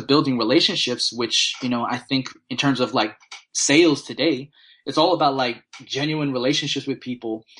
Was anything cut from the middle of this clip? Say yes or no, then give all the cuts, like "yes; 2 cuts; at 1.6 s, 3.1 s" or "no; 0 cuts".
no; 0 cuts